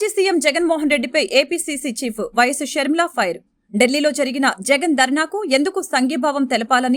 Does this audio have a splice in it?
no; 0 cuts

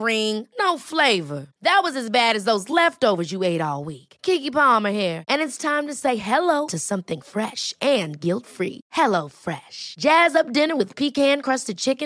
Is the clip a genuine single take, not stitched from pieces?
yes; 0 cuts

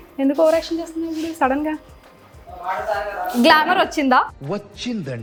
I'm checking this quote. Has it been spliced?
no; 0 cuts

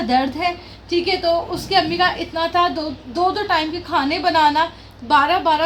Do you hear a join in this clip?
no; 0 cuts

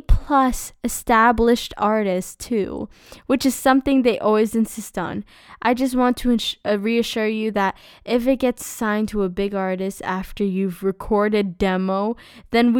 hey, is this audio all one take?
yes; 0 cuts

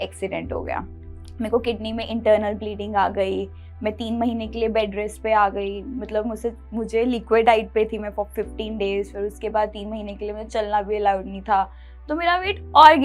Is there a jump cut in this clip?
no; 0 cuts

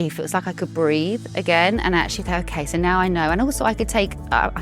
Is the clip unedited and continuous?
yes; 0 cuts

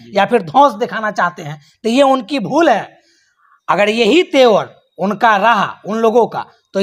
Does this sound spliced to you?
no; 0 cuts

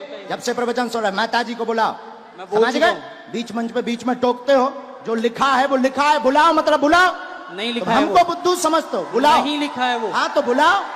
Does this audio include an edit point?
no; 0 cuts

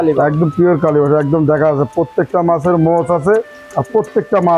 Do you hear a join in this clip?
no; 0 cuts

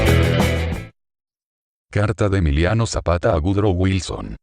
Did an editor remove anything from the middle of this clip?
yes; 1 cut; at 3.0 s

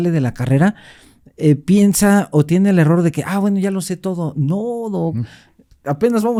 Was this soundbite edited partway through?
no; 0 cuts

